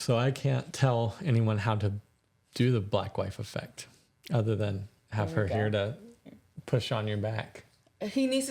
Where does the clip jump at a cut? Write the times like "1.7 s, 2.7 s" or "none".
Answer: none